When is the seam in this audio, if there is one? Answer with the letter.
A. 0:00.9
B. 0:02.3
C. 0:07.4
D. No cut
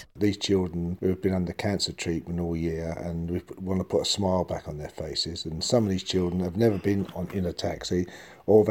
A